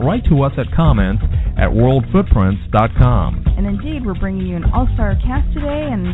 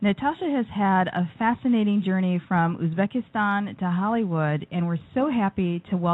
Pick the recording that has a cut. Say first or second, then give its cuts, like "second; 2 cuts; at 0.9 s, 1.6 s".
second; 1 cut; at 4.9 s